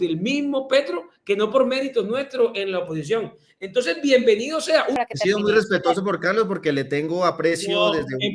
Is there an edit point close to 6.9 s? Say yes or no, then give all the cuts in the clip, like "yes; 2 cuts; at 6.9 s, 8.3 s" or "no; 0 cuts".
no; 1 cut; at 5.0 s